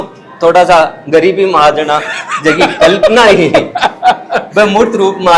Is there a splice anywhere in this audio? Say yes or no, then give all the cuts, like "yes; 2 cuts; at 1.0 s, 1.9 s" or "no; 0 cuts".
no; 0 cuts